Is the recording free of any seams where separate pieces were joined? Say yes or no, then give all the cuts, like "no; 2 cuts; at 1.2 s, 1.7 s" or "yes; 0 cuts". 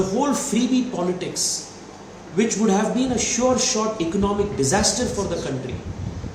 yes; 0 cuts